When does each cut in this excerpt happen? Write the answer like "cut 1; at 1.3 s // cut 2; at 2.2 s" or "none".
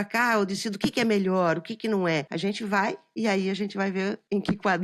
cut 1; at 2.3 s